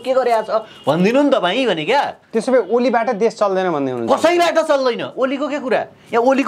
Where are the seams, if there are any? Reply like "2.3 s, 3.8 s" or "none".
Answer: none

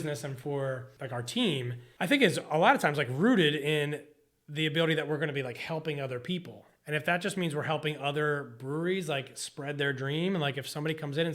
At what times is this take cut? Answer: 0.9 s, 1.8 s

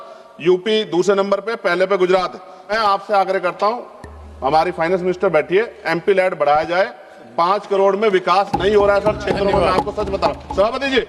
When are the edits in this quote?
2.7 s

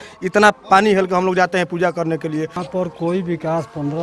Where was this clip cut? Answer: 2.6 s

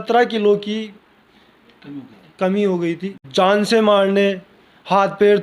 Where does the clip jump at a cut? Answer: 3.2 s

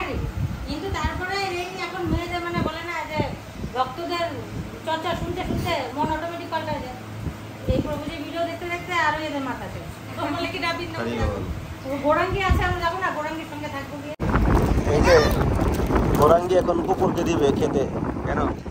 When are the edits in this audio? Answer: 14.1 s

